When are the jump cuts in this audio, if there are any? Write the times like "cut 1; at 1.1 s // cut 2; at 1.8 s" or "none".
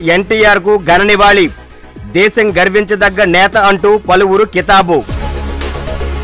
none